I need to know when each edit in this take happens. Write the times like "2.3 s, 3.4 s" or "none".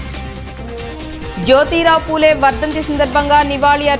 1.1 s